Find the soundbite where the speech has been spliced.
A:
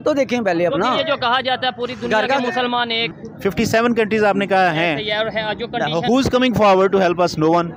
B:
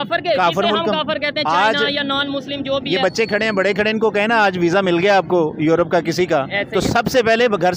A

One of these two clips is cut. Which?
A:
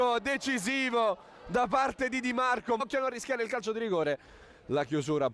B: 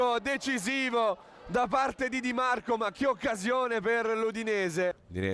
B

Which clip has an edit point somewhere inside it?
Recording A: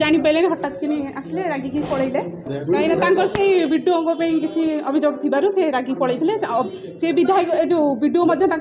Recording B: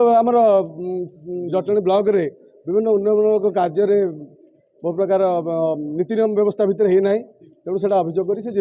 A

